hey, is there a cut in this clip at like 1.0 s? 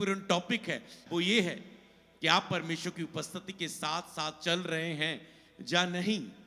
yes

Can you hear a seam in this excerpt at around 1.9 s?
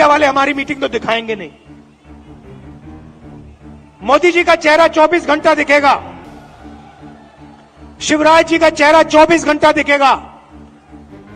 yes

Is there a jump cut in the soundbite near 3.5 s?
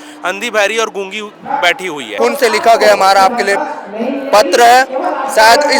no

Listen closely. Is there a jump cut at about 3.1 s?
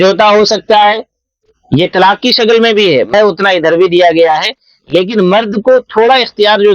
yes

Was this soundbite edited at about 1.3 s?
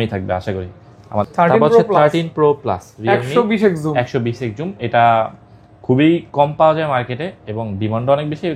yes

